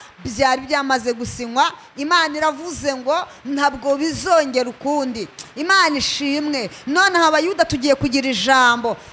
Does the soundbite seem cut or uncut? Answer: uncut